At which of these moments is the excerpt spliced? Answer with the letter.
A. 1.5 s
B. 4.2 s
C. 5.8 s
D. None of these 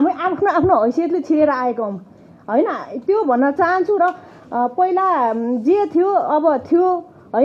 D